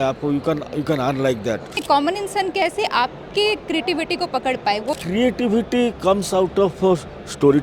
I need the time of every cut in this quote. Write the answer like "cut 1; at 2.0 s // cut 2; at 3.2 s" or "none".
cut 1; at 1.7 s // cut 2; at 5.0 s

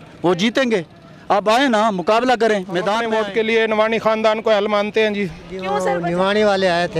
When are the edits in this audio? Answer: cut 1; at 3.1 s // cut 2; at 5.8 s

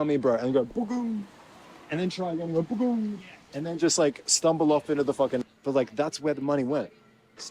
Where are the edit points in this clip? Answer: cut 1; at 5.4 s

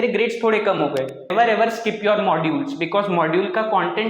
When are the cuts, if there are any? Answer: cut 1; at 1.3 s

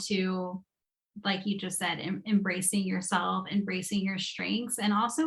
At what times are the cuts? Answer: none

